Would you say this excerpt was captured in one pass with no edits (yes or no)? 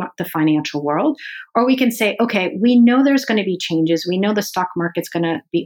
yes